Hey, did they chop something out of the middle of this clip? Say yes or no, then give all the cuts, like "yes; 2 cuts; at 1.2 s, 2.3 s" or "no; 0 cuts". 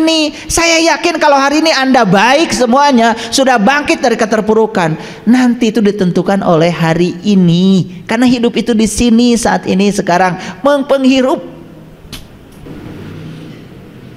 yes; 1 cut; at 12.7 s